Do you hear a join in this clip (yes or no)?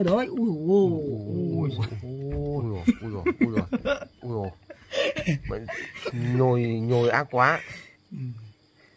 no